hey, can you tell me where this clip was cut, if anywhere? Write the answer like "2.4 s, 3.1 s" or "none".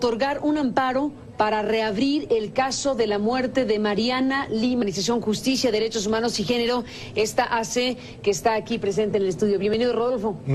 none